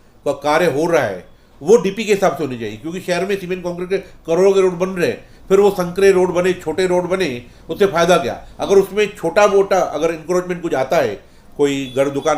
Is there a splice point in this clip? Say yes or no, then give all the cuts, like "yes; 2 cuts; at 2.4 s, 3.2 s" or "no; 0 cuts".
no; 0 cuts